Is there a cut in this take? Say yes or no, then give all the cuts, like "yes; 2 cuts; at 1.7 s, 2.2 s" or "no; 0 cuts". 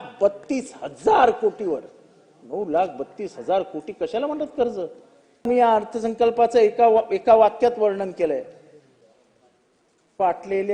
yes; 1 cut; at 5.5 s